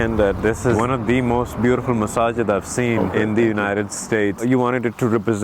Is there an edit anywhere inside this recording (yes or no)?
yes